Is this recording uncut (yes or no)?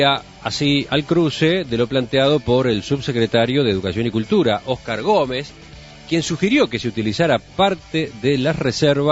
yes